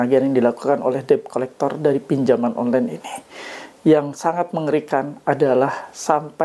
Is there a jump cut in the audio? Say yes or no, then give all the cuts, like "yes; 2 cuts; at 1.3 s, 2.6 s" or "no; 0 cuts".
no; 0 cuts